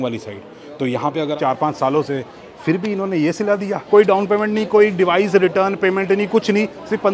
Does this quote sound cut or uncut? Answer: cut